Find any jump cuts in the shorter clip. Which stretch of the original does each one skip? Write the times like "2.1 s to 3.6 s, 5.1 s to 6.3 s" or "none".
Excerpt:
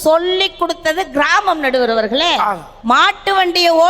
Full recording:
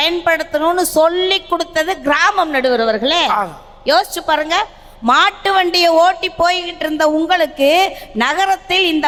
3.6 s to 4.9 s